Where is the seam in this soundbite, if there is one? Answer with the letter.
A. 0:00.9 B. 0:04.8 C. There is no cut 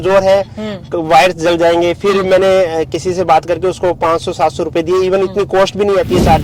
C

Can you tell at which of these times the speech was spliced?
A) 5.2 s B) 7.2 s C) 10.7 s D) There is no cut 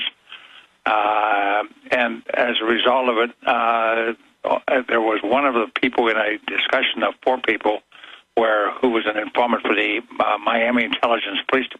A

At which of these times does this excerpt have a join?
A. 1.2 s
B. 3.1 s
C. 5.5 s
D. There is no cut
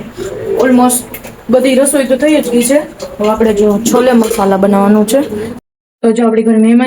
C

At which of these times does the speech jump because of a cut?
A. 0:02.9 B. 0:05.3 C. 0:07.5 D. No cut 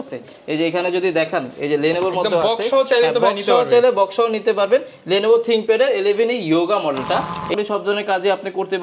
C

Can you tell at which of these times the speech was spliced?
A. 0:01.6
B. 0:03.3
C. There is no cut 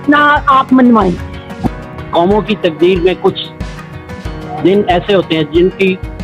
A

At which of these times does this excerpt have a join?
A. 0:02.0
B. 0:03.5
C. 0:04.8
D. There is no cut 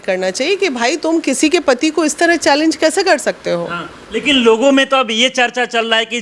D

